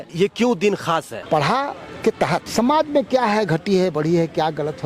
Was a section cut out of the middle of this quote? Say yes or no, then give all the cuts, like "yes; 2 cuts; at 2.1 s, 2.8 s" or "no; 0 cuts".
yes; 1 cut; at 1.1 s